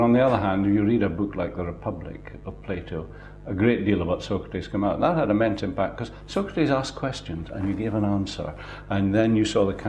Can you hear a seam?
yes; 1 cut; at 8.8 s

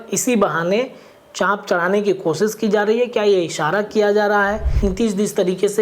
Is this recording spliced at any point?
yes; 1 cut; at 4.7 s

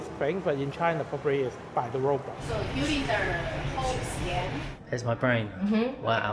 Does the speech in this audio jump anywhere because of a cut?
yes; 2 cuts; at 2.4 s, 4.7 s

